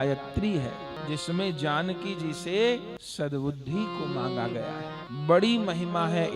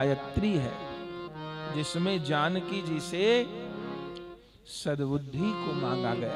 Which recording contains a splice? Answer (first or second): first